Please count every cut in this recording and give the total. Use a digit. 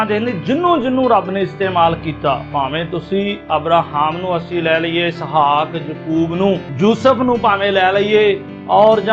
1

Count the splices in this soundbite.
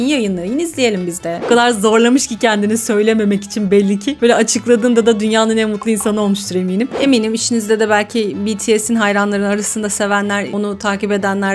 2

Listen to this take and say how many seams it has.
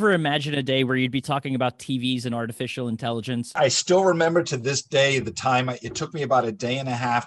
1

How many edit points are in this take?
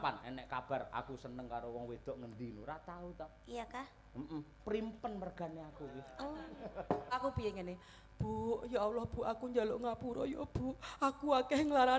1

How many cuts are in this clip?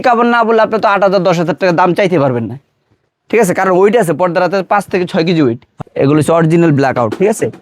1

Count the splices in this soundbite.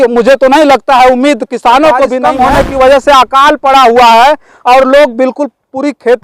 1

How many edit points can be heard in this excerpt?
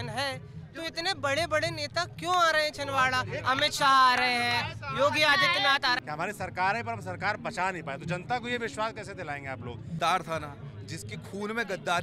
2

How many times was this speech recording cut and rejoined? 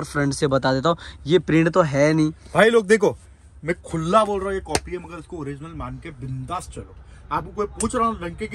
0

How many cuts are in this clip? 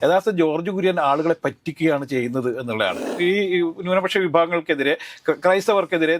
1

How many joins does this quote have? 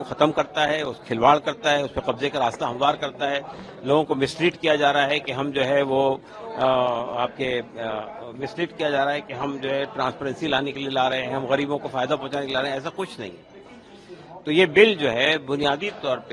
0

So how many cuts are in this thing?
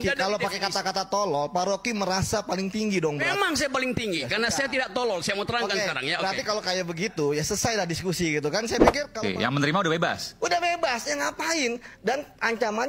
1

